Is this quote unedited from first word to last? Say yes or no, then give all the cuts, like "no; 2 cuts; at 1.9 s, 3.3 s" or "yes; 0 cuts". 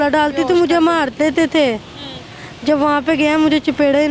yes; 0 cuts